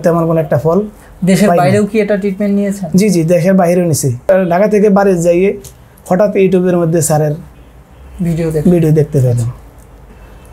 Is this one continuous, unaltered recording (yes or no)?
no